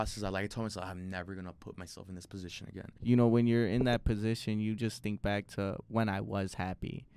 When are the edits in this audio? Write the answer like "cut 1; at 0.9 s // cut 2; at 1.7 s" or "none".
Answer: cut 1; at 2.9 s